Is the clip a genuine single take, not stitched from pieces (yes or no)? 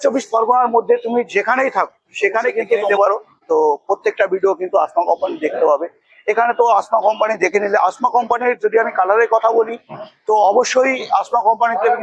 no